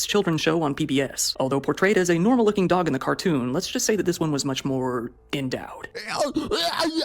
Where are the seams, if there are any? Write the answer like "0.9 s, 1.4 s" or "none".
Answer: 1.2 s